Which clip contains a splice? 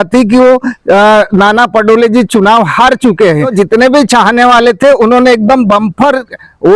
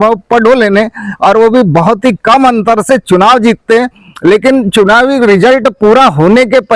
first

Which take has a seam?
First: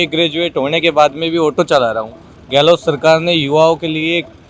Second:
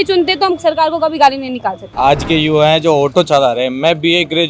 second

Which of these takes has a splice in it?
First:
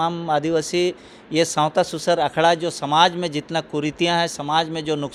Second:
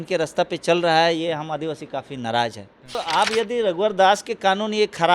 second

